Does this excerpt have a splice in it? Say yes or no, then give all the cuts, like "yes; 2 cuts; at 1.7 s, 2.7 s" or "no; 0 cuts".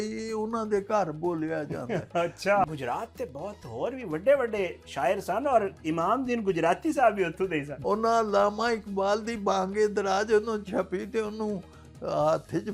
yes; 2 cuts; at 2.6 s, 7.7 s